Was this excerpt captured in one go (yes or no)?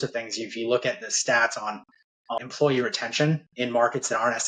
no